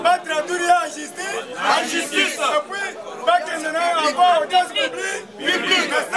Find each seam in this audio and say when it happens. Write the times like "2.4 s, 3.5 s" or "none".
none